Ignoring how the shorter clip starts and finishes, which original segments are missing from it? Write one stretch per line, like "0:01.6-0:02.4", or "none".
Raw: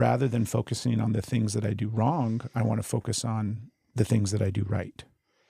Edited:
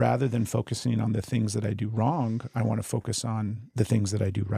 0:03.6-0:03.8